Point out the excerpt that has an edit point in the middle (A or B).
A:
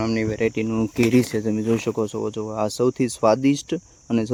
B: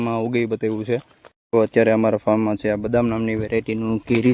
B